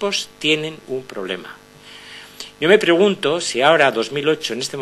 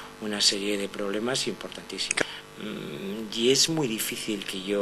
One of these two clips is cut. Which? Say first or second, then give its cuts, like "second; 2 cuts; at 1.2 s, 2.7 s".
second; 1 cut; at 2.2 s